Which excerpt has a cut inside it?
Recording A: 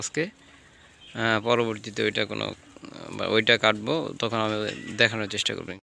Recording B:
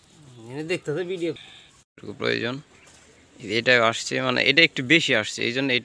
B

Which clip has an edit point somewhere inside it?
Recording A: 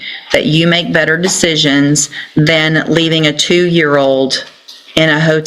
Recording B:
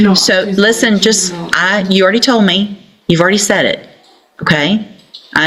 A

